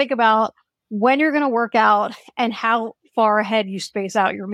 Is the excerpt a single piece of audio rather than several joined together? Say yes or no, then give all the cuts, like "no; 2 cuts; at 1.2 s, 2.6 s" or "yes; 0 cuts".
yes; 0 cuts